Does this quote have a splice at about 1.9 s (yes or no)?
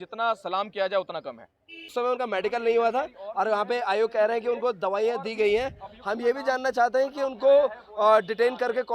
yes